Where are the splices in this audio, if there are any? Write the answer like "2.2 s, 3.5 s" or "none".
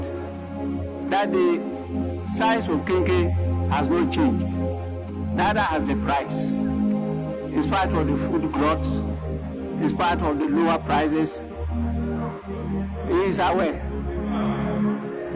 none